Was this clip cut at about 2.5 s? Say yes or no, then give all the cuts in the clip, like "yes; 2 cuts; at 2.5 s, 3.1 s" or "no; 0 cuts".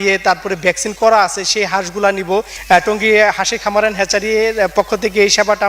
yes; 1 cut; at 2.5 s